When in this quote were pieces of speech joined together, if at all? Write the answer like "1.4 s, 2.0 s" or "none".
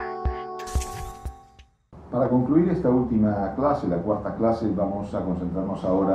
none